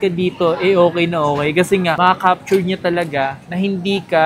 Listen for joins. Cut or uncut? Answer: uncut